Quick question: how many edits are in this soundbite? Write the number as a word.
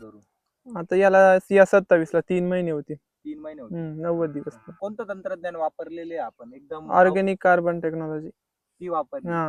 zero